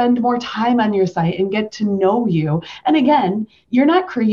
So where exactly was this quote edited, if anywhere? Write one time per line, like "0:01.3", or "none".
none